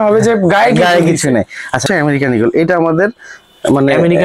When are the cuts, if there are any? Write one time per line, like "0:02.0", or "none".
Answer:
0:01.8